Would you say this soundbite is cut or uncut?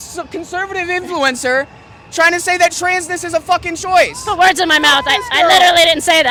uncut